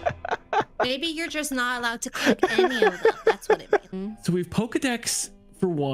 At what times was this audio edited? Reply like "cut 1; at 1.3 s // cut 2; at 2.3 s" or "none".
cut 1; at 3.9 s